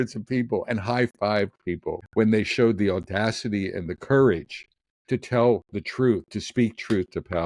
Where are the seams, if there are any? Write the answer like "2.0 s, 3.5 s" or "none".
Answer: 2.0 s